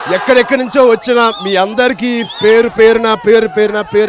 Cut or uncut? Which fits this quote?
uncut